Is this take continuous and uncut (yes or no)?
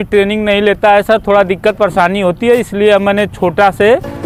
yes